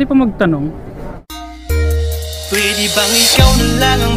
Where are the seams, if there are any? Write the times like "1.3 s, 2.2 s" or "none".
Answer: 1.2 s